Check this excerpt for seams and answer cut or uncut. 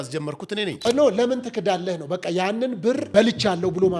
cut